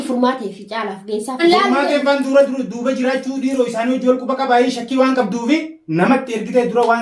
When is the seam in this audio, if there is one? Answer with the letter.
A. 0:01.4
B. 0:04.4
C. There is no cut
A